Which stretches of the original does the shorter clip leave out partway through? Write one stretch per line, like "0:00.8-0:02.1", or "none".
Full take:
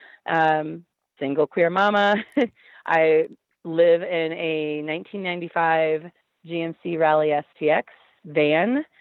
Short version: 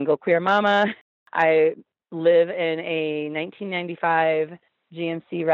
0:02.3-0:02.5